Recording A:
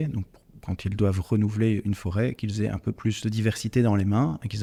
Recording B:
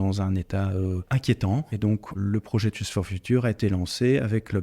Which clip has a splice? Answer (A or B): B